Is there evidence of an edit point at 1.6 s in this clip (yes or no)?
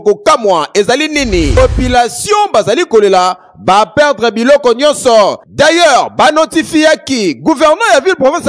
yes